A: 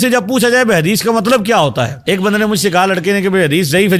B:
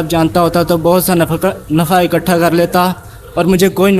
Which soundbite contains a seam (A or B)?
A